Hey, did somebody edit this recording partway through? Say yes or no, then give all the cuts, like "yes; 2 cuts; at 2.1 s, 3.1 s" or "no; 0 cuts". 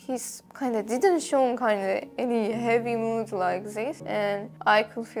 no; 0 cuts